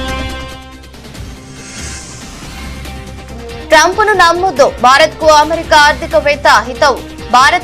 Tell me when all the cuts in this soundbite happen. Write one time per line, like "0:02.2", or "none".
none